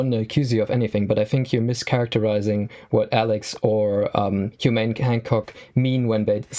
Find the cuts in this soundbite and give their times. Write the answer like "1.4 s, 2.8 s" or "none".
none